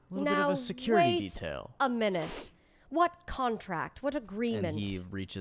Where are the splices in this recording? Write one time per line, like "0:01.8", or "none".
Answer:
none